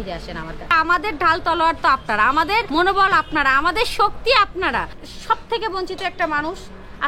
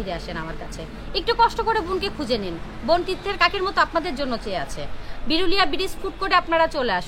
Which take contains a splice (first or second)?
first